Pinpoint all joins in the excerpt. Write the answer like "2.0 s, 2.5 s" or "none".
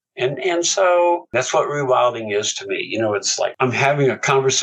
1.3 s, 3.5 s